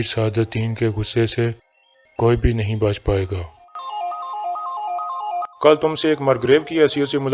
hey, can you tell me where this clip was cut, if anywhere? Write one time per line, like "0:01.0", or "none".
none